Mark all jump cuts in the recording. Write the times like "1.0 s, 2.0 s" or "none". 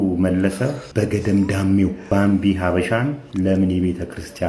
0.8 s, 2.0 s, 3.2 s